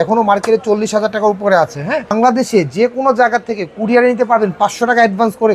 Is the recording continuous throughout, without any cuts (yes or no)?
no